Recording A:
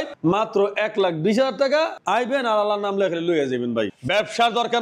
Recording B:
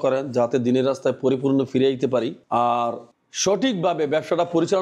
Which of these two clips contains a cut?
A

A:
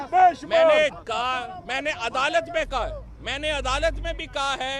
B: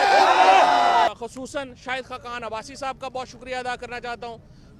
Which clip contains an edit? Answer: B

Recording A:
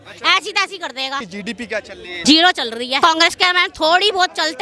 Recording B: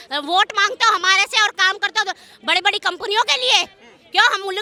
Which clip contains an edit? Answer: A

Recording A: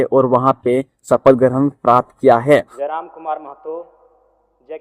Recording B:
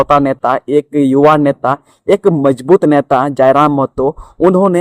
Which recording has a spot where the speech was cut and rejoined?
A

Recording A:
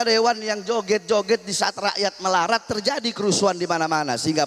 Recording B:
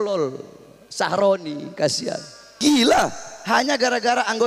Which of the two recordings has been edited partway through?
B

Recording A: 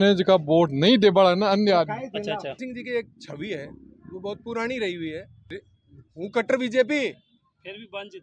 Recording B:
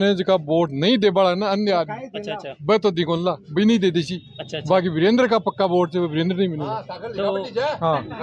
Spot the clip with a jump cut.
A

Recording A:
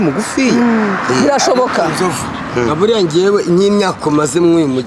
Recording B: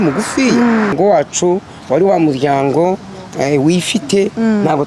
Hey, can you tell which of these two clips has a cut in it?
B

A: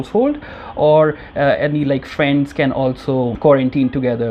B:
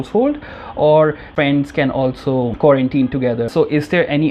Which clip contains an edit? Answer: B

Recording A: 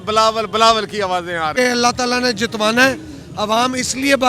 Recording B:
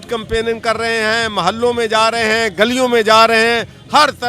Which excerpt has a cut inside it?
A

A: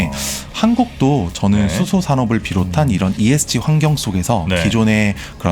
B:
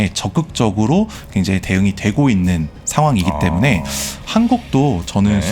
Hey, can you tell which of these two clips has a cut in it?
B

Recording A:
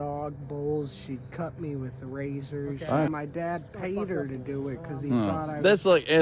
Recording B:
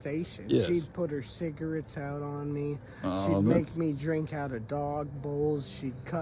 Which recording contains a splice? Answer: A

